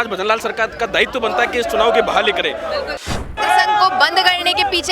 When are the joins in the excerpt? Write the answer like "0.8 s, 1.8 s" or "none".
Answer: 3.2 s